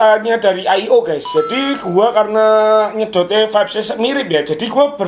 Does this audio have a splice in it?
no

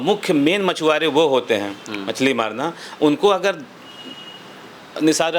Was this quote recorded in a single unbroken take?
yes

